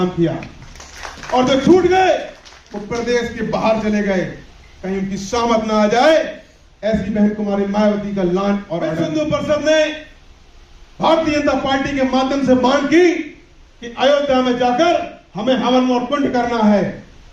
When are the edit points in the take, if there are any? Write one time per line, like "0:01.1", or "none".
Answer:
0:08.9